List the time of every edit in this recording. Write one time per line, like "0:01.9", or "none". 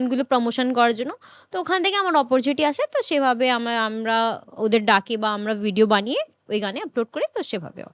none